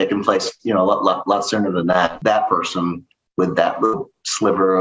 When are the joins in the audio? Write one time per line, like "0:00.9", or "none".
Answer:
0:02.2